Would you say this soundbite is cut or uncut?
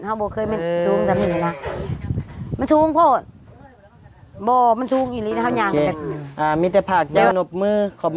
cut